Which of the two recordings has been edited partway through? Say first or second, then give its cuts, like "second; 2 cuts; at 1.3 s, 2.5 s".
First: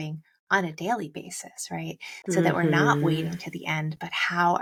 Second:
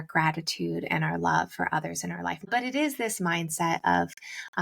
second; 1 cut; at 2.5 s